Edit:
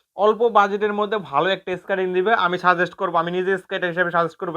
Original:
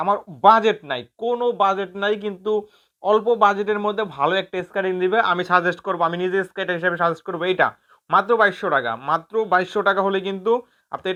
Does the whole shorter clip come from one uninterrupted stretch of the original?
yes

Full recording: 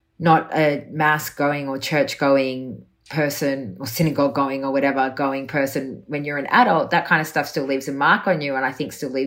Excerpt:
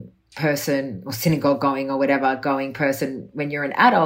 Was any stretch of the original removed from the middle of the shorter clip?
no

